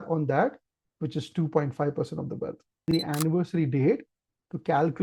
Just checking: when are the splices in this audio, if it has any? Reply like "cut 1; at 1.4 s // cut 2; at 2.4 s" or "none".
cut 1; at 2.9 s